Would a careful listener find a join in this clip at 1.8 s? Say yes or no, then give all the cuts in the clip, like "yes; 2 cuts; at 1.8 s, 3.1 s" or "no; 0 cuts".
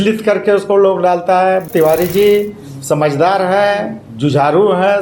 yes; 1 cut; at 1.8 s